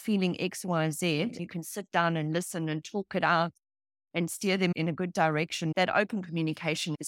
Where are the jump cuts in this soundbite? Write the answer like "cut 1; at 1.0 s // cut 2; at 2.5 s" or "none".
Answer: cut 1; at 1.4 s // cut 2; at 4.7 s